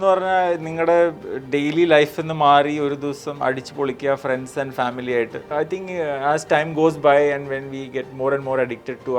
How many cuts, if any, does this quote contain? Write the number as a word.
one